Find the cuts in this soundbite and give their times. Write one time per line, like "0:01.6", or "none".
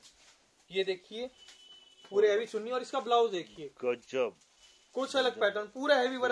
none